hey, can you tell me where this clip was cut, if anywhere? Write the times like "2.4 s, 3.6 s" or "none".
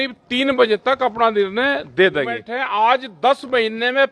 2.4 s